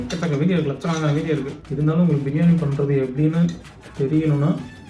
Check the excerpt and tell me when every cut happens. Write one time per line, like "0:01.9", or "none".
0:01.6